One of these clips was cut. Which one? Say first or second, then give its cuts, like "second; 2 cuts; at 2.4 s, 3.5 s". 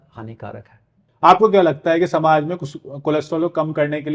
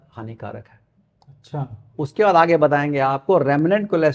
first; 1 cut; at 1.0 s